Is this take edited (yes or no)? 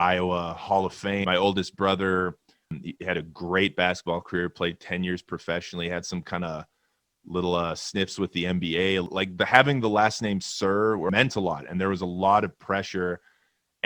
yes